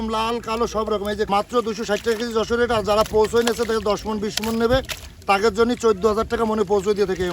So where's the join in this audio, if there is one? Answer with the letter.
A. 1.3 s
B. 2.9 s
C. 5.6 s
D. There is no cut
A